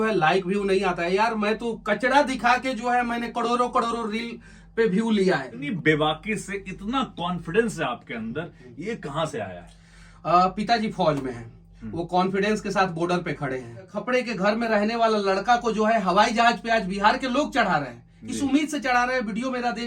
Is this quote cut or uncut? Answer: cut